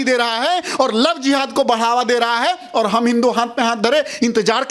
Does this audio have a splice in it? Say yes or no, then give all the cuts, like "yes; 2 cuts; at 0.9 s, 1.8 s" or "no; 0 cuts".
no; 0 cuts